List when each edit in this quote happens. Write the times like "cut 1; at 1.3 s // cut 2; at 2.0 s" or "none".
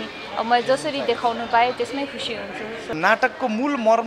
cut 1; at 2.9 s